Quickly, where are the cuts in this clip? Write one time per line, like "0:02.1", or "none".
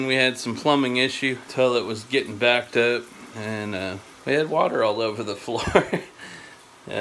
0:01.4
0:04.1